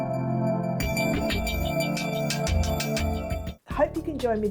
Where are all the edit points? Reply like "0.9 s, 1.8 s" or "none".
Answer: 3.5 s